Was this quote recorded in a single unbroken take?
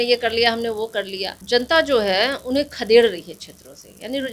no; 1 cut; at 1.4 s

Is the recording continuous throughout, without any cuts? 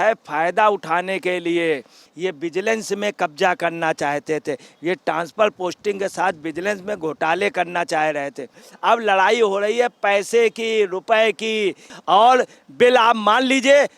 no; 3 cuts; at 2.1 s, 8.7 s, 11.9 s

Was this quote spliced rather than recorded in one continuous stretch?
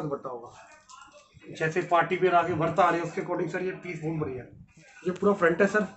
yes; 1 cut; at 4.6 s

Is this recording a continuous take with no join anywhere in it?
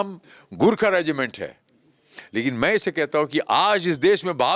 yes; 0 cuts

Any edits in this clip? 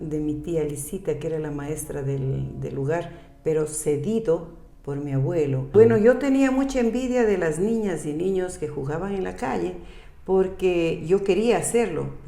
yes; 1 cut; at 5.7 s

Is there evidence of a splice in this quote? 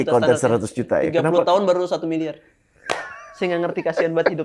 no; 0 cuts

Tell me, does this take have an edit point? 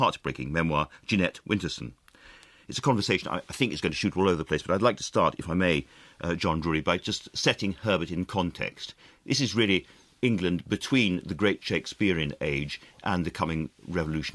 no; 0 cuts

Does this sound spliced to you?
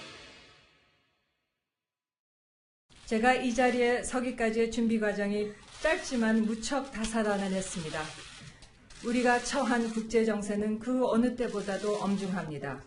no; 0 cuts

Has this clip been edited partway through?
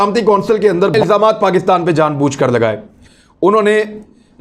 yes; 2 cuts; at 0.9 s, 2.9 s

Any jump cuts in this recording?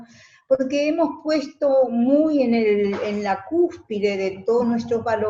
no; 0 cuts

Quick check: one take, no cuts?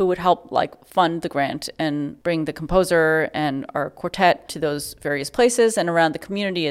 no; 1 cut; at 4.5 s

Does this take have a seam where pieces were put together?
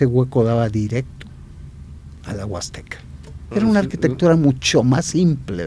yes; 1 cut; at 3.4 s

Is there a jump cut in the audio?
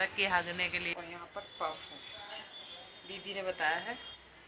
yes; 1 cut; at 0.9 s

